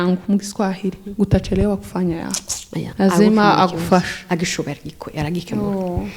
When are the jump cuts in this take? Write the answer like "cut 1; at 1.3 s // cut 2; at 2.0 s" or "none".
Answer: cut 1; at 2.9 s